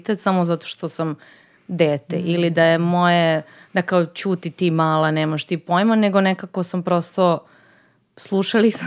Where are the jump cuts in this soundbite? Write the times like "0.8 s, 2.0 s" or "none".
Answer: none